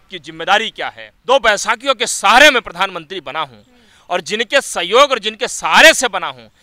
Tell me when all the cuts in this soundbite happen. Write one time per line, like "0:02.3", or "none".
0:01.1